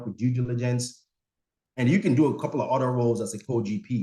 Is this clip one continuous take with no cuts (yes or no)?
yes